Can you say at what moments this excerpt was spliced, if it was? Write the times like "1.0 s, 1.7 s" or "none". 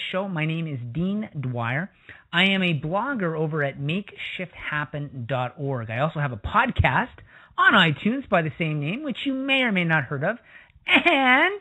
none